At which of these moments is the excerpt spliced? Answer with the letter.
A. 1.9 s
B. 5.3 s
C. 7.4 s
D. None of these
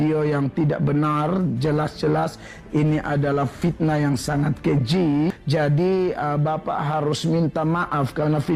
B